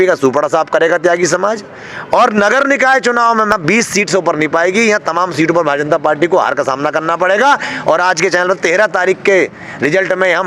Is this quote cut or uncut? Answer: cut